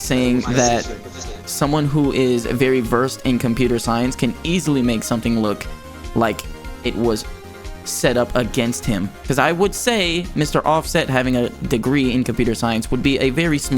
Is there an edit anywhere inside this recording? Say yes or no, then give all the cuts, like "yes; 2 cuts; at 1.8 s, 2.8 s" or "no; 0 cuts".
yes; 1 cut; at 9.1 s